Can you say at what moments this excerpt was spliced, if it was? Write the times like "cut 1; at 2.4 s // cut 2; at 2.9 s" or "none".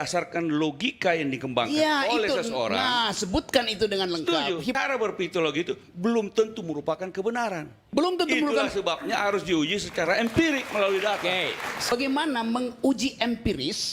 cut 1; at 4.8 s // cut 2; at 11.9 s